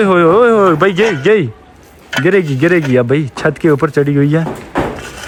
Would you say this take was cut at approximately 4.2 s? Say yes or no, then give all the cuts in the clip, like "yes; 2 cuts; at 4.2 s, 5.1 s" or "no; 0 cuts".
no; 0 cuts